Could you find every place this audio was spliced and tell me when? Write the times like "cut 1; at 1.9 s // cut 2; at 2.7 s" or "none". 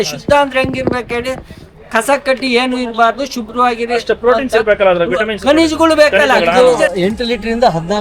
cut 1; at 6.6 s